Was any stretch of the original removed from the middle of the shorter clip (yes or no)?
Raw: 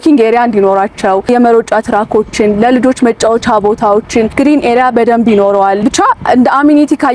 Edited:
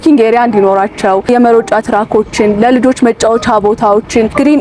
no